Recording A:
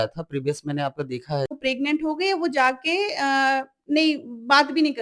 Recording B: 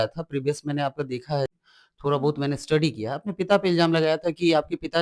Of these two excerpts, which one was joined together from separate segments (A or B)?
A